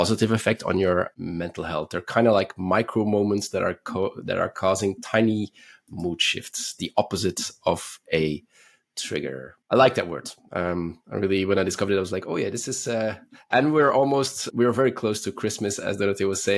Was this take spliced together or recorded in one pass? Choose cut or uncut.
cut